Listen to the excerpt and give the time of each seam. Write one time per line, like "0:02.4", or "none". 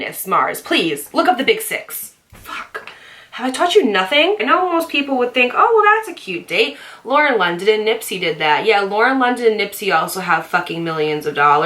0:04.4